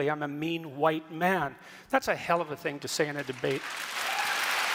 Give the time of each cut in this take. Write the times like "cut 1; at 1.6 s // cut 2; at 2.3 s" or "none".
none